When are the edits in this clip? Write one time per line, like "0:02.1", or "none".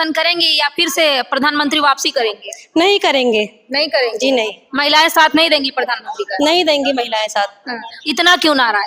none